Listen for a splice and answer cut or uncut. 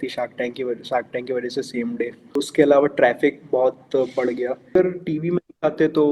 cut